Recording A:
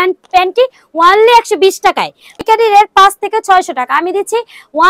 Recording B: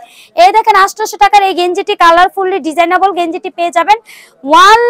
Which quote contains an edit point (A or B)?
A